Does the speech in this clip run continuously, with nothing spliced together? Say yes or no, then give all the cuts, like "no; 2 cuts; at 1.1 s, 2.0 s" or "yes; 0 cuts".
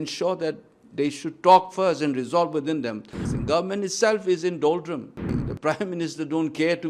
no; 2 cuts; at 3.2 s, 5.3 s